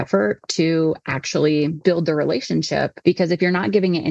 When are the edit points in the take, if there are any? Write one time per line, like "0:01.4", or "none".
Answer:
0:01.8
0:02.9